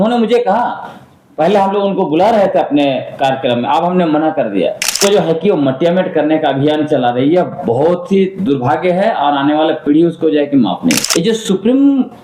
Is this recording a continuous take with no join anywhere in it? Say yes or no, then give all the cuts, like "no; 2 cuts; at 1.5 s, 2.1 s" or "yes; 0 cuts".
no; 2 cuts; at 4.8 s, 11.0 s